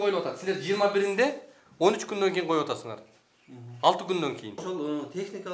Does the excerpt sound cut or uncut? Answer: cut